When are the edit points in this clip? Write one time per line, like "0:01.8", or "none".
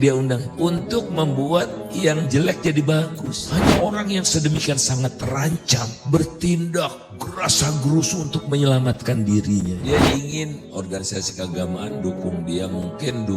0:03.4
0:09.8